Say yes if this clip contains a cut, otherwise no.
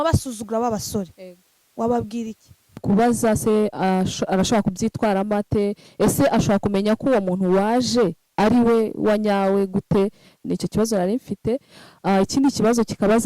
yes